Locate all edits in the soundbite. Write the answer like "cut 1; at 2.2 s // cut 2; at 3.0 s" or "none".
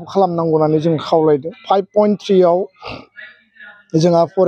cut 1; at 1.5 s